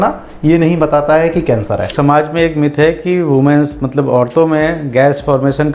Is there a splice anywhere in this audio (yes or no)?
yes